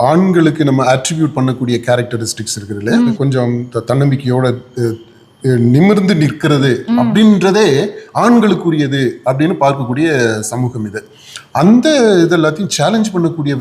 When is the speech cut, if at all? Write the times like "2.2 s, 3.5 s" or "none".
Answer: 3.2 s